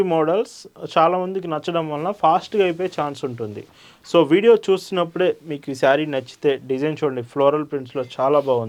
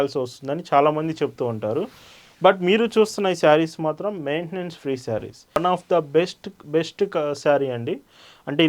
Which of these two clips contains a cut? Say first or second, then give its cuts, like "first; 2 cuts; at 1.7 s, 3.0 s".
second; 1 cut; at 5.6 s